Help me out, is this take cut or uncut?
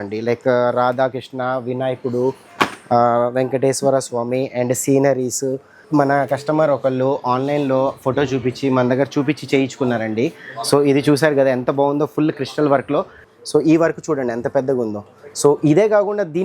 cut